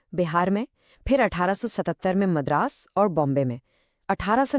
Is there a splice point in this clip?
no; 0 cuts

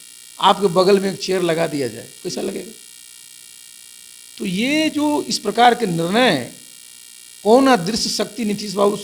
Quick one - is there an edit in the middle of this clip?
no; 0 cuts

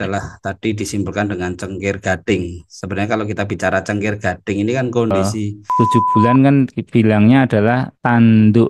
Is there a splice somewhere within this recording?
yes; 1 cut; at 5.6 s

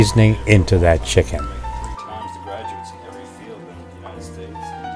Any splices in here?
yes; 1 cut; at 1.3 s

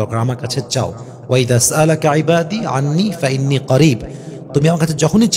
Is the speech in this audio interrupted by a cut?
no; 0 cuts

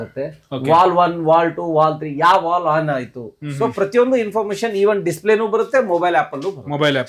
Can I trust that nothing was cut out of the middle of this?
yes; 0 cuts

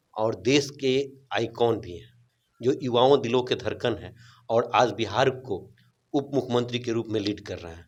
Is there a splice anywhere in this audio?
no; 0 cuts

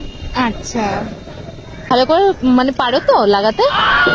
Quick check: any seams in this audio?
yes; 1 cut; at 1.9 s

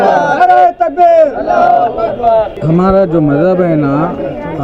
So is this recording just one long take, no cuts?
yes; 0 cuts

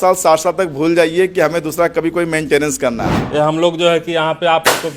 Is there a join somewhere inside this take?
yes; 1 cut; at 3.1 s

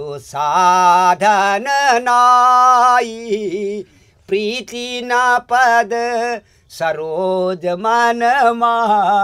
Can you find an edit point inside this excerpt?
no; 0 cuts

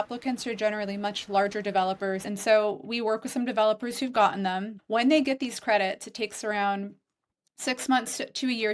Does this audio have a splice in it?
yes; 2 cuts; at 2.2 s, 4.7 s

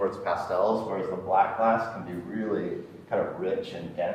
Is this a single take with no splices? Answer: yes; 0 cuts

